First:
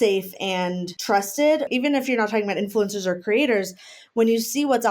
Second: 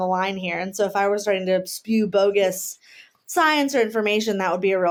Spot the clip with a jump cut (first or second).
first